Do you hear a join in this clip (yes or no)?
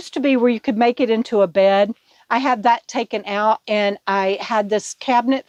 no